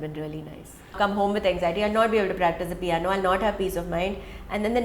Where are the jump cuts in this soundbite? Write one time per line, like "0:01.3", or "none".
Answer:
0:00.9